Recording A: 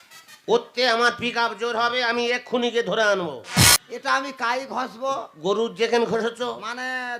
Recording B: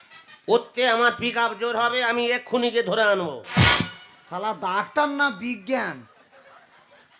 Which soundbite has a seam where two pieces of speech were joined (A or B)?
A